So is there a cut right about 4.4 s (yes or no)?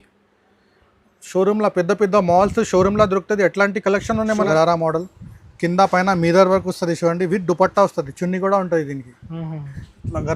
yes